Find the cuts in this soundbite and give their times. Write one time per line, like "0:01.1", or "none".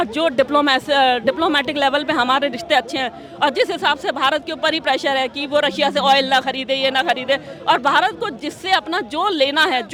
none

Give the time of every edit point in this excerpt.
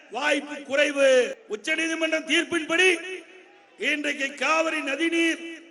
0:01.4

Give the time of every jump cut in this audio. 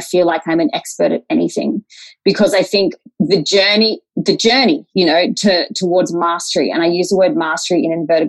none

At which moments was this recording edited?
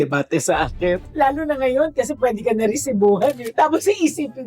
0:01.0

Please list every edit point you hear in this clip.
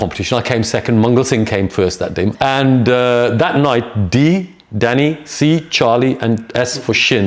0:02.3

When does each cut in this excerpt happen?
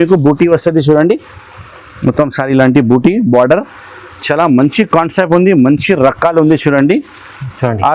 none

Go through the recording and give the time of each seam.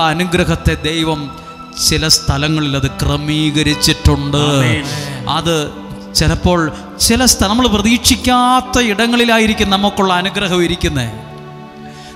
none

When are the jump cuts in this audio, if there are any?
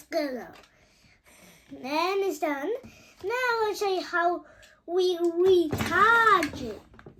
none

